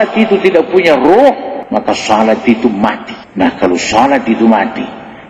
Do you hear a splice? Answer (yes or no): yes